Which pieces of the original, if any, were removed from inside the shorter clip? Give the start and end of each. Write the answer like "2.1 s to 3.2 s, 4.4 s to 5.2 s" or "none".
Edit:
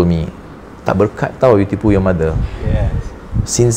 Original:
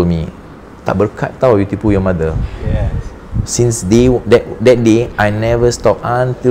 none